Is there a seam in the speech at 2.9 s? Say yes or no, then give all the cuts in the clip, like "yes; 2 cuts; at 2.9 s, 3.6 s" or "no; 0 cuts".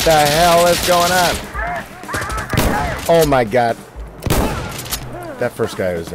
yes; 1 cut; at 2.9 s